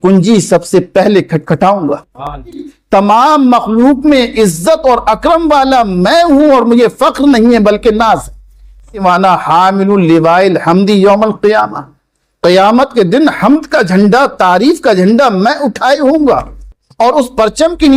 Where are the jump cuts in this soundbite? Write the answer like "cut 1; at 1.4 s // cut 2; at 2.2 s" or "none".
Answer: cut 1; at 2.7 s // cut 2; at 9.0 s

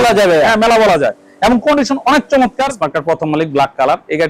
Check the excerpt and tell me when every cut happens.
cut 1; at 2.6 s

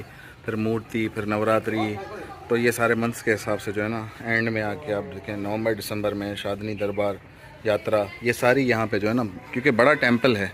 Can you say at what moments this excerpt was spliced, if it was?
none

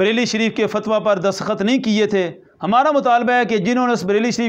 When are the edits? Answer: none

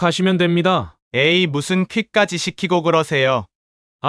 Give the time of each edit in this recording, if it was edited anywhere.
cut 1; at 0.9 s

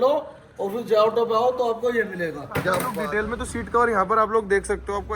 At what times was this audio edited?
cut 1; at 2.9 s

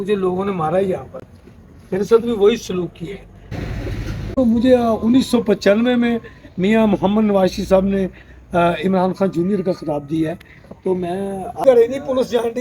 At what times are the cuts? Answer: cut 1; at 3.6 s // cut 2; at 11.6 s

